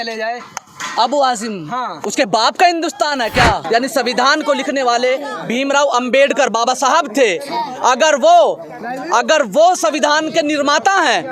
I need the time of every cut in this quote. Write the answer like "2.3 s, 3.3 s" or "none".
3.6 s